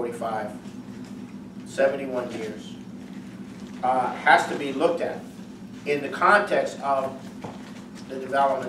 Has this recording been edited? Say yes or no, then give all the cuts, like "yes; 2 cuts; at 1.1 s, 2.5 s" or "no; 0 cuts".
yes; 1 cut; at 2.7 s